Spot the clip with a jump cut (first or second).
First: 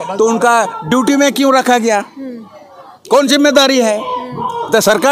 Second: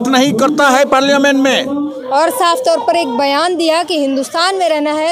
second